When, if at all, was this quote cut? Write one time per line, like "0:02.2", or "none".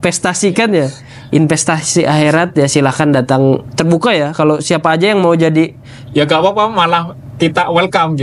none